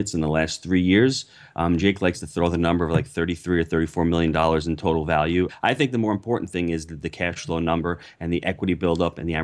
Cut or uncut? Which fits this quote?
cut